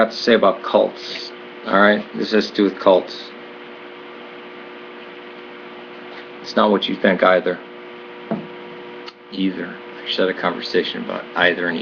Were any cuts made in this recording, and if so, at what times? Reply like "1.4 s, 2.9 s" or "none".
9.6 s